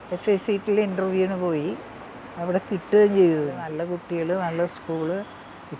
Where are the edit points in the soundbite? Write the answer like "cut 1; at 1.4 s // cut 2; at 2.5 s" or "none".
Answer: cut 1; at 3.7 s